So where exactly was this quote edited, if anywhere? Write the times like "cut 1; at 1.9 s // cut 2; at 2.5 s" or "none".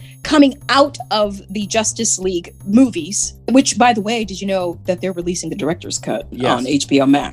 cut 1; at 2.5 s // cut 2; at 3.5 s // cut 3; at 6.3 s